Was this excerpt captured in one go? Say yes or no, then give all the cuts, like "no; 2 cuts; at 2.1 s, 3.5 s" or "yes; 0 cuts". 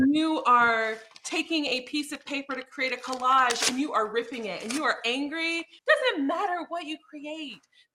no; 1 cut; at 5.7 s